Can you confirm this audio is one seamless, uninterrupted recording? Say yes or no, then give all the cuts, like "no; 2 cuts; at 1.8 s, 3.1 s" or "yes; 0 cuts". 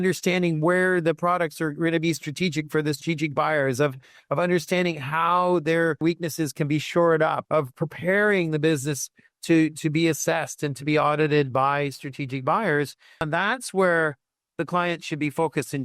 no; 1 cut; at 13.2 s